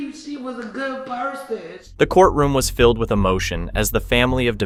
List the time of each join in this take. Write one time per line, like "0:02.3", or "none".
none